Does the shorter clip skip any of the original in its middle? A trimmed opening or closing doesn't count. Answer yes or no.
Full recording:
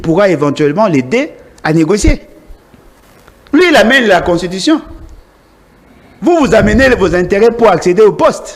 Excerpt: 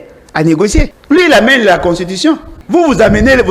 yes